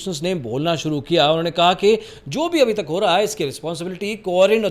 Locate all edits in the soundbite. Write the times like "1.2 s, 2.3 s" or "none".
none